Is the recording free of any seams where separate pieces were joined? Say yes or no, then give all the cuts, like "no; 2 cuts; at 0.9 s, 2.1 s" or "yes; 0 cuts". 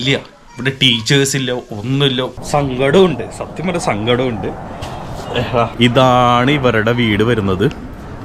no; 1 cut; at 2.4 s